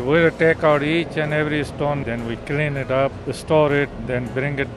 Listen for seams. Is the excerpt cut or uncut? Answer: cut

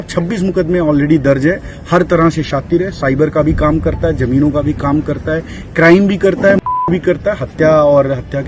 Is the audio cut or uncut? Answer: uncut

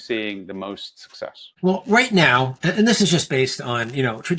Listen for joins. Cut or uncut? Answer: uncut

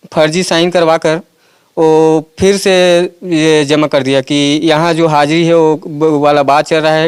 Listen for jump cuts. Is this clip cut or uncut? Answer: uncut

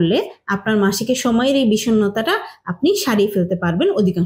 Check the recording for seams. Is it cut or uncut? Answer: uncut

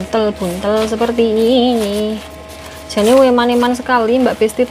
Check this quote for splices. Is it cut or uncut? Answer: uncut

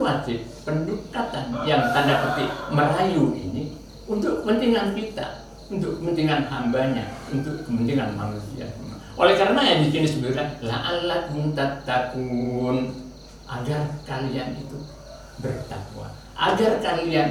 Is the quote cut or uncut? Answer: uncut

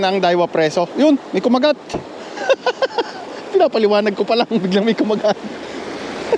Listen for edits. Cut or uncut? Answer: uncut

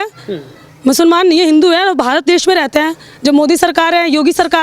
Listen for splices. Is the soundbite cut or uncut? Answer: uncut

